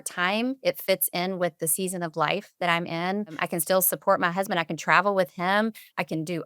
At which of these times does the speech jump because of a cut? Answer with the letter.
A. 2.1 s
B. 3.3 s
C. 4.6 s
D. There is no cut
B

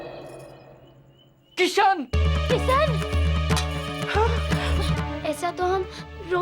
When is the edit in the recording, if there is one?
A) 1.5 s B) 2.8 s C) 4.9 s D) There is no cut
C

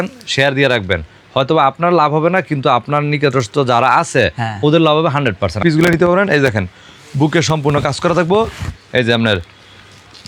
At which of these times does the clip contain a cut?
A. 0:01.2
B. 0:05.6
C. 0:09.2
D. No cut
B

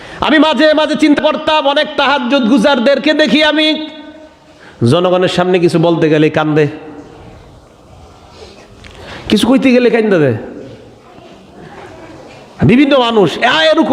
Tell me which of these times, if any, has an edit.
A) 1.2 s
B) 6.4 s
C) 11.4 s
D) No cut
A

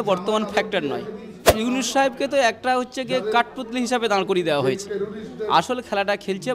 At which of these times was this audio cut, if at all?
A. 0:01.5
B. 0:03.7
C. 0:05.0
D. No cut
A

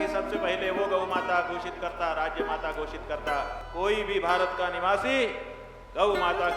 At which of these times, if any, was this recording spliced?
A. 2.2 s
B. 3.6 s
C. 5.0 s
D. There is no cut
B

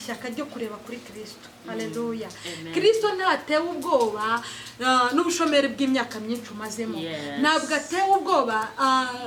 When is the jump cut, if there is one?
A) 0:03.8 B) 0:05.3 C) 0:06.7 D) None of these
D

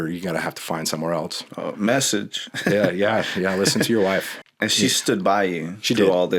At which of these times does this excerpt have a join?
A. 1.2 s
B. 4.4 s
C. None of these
B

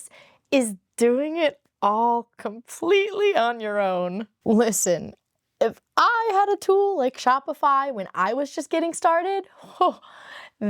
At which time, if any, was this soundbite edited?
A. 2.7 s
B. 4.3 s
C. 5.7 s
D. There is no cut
B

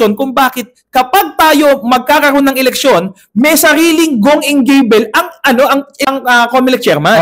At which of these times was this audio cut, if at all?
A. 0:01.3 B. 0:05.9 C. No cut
B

